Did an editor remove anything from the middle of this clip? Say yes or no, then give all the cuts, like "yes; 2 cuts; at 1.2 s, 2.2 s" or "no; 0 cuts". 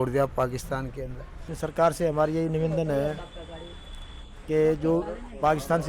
yes; 1 cut; at 1.5 s